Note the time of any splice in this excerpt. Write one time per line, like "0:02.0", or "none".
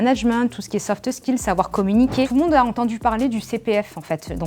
0:02.3